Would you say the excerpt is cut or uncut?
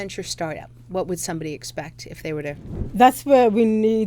cut